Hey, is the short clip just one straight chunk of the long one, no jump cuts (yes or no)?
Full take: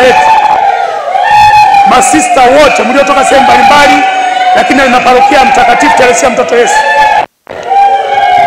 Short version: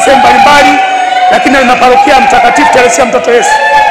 yes